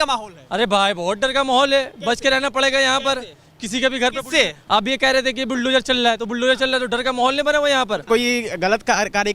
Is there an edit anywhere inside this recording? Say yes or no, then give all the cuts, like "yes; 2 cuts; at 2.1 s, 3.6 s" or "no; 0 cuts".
yes; 1 cut; at 8.0 s